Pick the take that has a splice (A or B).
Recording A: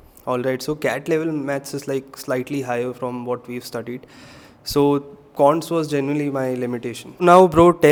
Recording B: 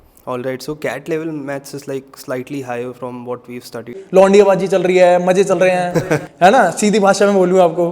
B